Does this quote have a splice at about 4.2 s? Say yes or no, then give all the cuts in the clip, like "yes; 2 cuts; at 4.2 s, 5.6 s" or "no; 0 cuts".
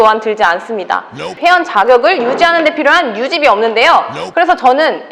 yes; 2 cuts; at 1.3 s, 4.2 s